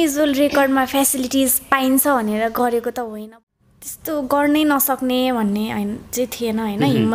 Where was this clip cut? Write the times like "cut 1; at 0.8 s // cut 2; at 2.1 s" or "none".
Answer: cut 1; at 3.1 s